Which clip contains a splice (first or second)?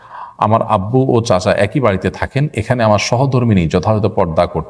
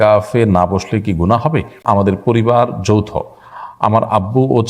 second